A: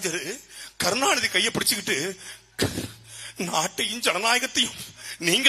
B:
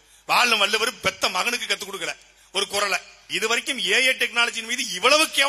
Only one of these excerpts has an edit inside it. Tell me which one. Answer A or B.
B